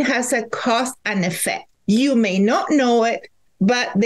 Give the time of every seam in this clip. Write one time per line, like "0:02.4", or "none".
0:01.7